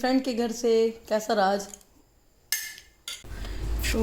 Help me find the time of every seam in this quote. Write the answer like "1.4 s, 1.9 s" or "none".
3.1 s